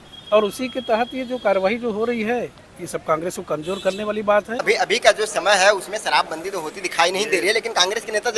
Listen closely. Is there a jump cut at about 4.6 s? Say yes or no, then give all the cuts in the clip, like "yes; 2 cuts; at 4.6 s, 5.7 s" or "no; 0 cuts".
yes; 1 cut; at 4.6 s